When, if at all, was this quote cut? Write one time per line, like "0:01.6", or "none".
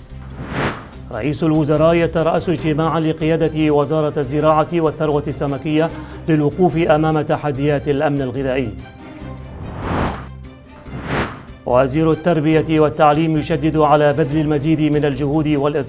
0:00.9